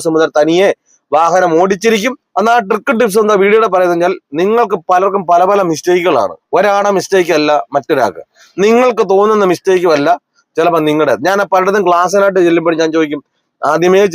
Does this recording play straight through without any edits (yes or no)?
no